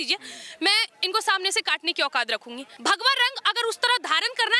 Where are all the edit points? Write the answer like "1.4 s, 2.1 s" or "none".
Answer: 2.6 s